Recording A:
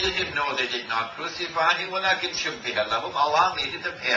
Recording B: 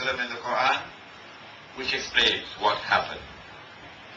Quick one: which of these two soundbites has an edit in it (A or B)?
B